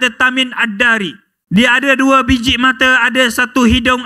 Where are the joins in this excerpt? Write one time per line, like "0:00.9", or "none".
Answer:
0:01.3